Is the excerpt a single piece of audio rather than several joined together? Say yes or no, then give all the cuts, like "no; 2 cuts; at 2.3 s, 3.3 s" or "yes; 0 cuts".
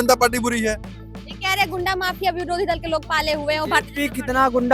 yes; 0 cuts